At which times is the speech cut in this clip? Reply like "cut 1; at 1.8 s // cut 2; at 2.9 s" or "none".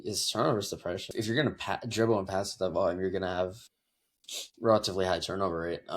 cut 1; at 1.1 s